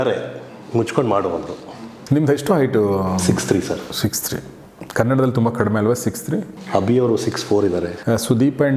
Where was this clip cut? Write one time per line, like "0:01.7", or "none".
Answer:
0:01.6
0:06.7
0:08.0